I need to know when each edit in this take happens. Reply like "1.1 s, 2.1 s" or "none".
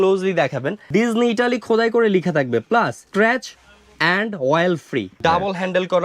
0.8 s, 3.0 s, 5.1 s